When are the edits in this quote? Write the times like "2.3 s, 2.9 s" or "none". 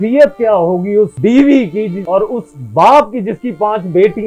1.1 s, 1.9 s